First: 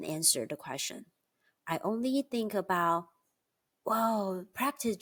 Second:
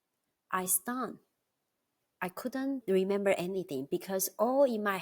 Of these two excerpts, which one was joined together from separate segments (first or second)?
second